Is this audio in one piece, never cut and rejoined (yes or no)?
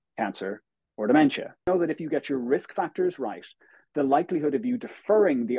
no